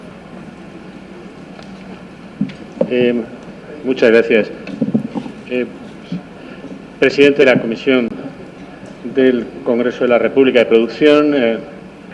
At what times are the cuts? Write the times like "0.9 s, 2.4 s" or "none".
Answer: 9.0 s